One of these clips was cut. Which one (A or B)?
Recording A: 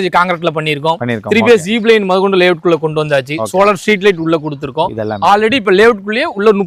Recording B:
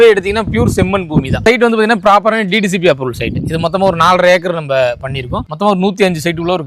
B